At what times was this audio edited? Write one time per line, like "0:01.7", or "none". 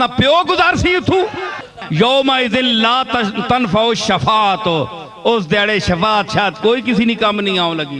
0:01.8